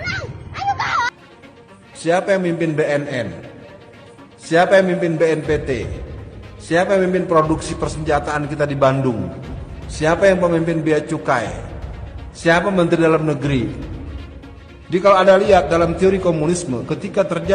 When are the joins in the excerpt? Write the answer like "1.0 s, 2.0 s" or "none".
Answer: 1.3 s